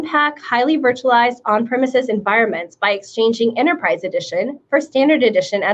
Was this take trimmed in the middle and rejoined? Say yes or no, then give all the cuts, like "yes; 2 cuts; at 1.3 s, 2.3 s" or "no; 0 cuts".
no; 0 cuts